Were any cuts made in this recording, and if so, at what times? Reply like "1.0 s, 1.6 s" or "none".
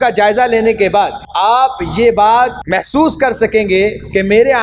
1.2 s, 2.6 s